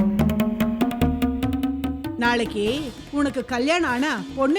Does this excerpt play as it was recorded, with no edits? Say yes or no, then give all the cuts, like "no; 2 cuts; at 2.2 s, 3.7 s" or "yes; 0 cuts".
yes; 0 cuts